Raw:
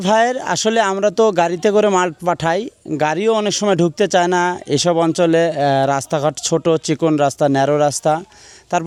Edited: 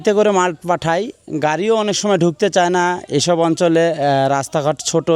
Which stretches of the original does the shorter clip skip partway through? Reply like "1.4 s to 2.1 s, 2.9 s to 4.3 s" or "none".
none